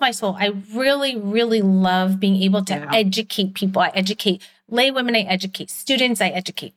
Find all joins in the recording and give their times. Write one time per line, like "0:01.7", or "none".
none